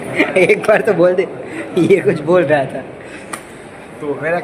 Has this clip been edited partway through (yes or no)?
no